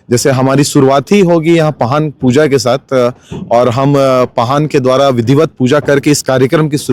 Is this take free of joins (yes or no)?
yes